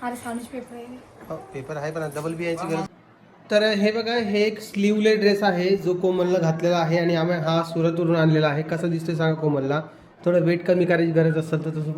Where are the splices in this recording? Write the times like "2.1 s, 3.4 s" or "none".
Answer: 2.9 s